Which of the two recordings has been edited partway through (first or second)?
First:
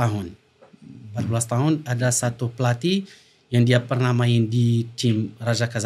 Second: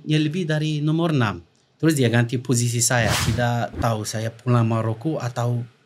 second